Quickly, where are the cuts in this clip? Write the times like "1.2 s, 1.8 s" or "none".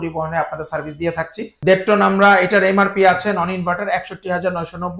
1.5 s